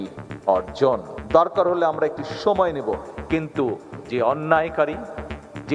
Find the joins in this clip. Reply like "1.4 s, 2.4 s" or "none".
1.1 s